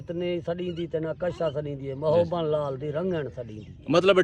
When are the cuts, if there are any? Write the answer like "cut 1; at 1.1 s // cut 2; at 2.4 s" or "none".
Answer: none